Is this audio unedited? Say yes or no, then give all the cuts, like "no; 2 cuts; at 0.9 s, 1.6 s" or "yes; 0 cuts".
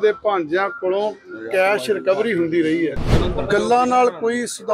no; 1 cut; at 3.1 s